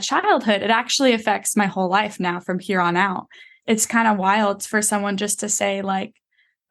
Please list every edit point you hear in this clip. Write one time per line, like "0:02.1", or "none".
0:03.5